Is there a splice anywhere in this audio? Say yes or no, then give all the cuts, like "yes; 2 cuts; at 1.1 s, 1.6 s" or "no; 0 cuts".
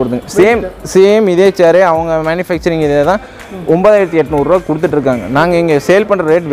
no; 0 cuts